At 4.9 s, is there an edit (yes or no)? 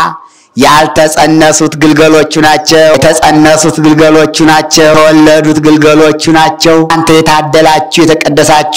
yes